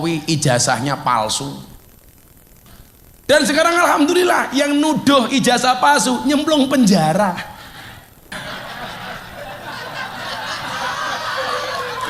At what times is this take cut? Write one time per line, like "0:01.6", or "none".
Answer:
0:08.2